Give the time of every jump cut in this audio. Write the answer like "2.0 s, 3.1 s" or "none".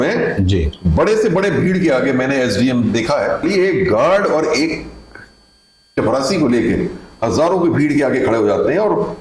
none